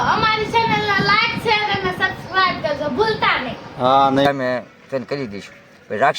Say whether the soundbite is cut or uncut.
cut